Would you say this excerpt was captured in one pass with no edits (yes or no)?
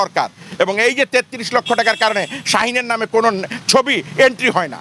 yes